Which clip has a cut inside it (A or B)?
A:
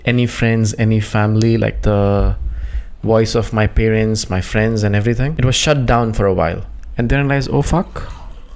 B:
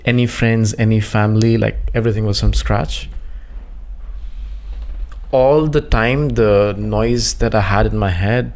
A